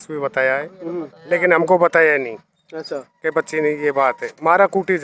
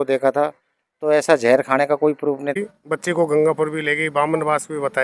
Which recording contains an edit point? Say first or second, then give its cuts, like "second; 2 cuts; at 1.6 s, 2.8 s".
second; 1 cut; at 2.6 s